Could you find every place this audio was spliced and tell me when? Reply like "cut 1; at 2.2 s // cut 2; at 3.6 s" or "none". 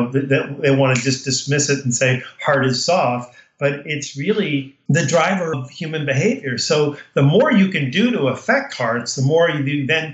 cut 1; at 4.7 s // cut 2; at 5.6 s

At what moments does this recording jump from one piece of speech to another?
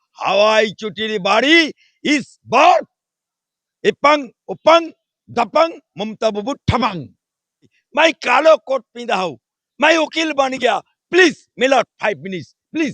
cut 1; at 7.8 s

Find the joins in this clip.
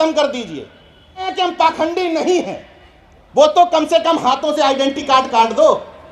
cut 1; at 1.3 s

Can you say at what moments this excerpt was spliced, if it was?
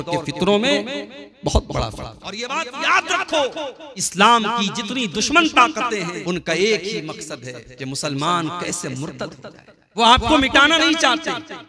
cut 1; at 2.4 s // cut 2; at 4.1 s // cut 3; at 6.2 s // cut 4; at 10.0 s

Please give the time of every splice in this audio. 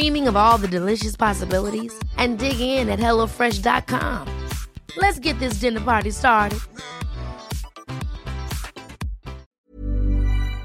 cut 1; at 9.4 s

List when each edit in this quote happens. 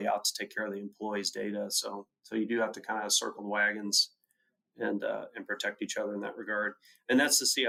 none

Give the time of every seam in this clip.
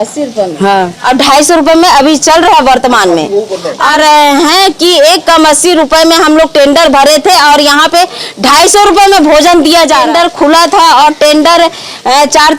cut 1; at 3.9 s // cut 2; at 10.1 s

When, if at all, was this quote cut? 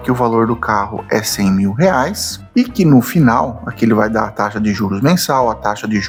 none

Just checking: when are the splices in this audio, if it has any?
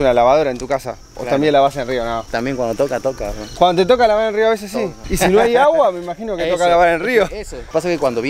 none

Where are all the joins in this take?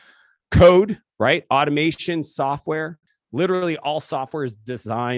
cut 1; at 3.1 s

